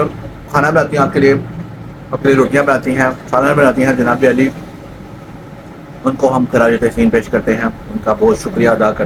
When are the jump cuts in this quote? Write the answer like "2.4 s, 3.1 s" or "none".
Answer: none